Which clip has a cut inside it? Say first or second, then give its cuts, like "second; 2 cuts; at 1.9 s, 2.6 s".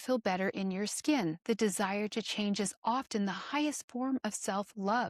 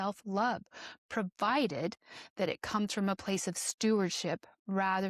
first; 1 cut; at 1.4 s